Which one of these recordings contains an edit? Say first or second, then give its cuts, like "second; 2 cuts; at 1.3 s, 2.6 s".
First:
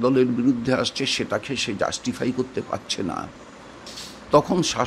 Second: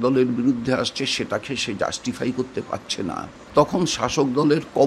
second; 1 cut; at 3.4 s